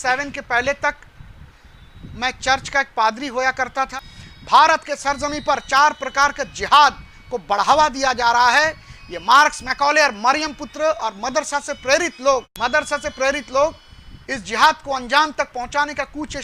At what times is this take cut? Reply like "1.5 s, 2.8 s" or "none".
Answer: 3.9 s, 12.5 s